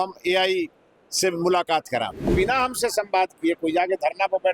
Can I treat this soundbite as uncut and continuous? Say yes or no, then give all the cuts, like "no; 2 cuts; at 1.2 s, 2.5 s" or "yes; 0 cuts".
no; 1 cut; at 2.3 s